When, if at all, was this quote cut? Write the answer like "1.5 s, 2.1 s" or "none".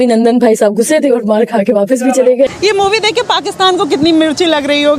2.5 s

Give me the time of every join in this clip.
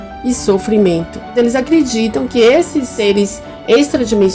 1.2 s, 2.9 s

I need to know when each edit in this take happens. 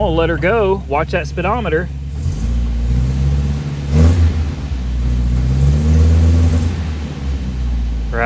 none

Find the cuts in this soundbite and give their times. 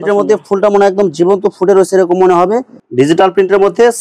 2.8 s

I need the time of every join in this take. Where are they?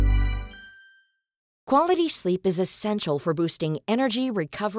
1.5 s

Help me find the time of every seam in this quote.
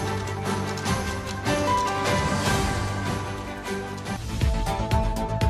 none

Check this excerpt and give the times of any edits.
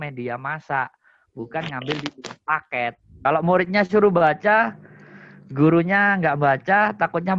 3.1 s

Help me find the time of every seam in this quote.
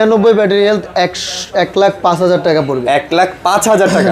none

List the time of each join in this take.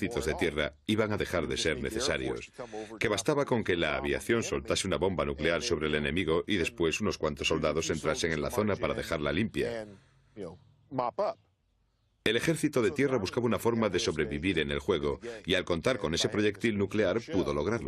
1.5 s

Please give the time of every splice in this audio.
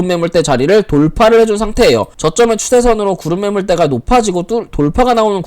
2.2 s

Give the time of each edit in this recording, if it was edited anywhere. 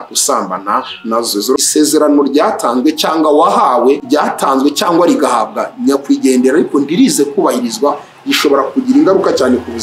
1.6 s, 4.0 s

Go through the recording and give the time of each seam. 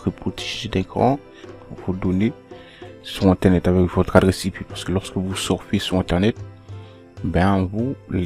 1.7 s

